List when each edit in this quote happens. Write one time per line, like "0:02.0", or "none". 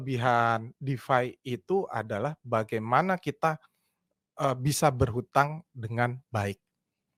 none

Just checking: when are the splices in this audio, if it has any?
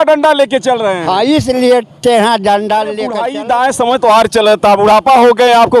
0:03.2

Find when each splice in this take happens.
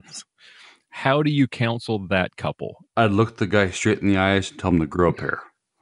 0:02.7

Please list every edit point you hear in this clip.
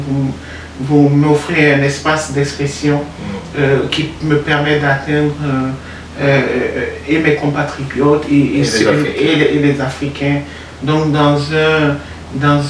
none

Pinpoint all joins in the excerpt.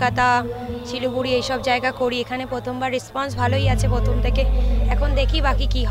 none

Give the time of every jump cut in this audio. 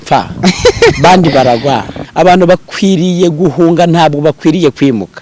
0:02.0

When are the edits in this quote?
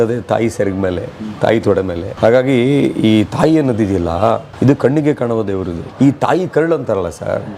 0:02.0
0:04.5
0:05.9

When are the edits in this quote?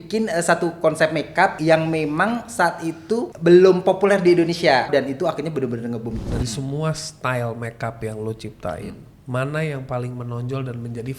0:01.6
0:03.3
0:04.9
0:06.2

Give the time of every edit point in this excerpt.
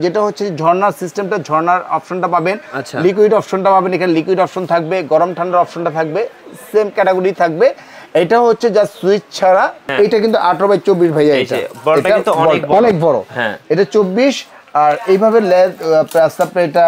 0:09.8

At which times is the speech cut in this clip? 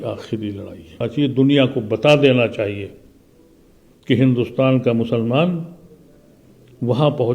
0:01.1

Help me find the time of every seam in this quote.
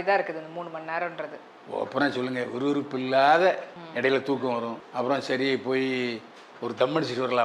0:03.8
0:04.8

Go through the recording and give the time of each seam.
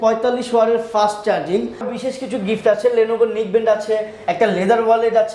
0:01.9

